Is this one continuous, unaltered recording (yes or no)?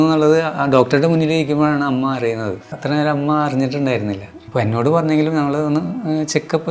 no